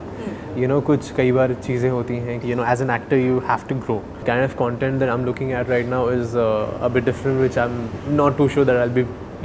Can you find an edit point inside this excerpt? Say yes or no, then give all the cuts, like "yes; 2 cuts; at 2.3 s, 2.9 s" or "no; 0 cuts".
yes; 2 cuts; at 2.3 s, 4.2 s